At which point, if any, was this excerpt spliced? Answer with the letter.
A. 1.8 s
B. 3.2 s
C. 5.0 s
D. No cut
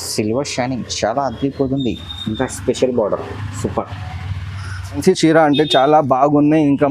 C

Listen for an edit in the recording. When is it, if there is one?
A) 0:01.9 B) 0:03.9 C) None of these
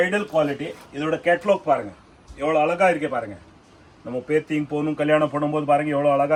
C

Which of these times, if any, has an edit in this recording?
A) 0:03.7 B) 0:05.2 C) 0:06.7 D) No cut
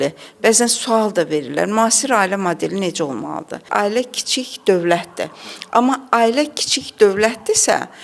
A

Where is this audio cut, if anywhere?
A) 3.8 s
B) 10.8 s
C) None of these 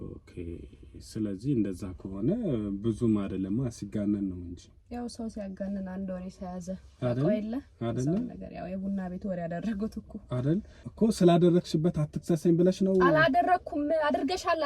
B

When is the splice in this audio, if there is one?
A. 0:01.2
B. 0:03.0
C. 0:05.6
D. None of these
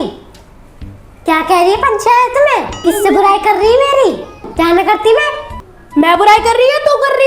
C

